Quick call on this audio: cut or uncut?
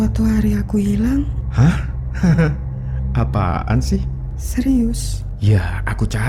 uncut